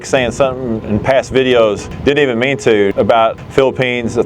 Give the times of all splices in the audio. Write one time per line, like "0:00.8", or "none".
0:01.9
0:03.0